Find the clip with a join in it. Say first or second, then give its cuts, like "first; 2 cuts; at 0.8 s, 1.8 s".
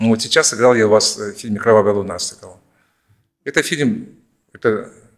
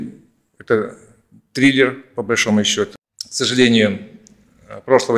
second; 1 cut; at 2.9 s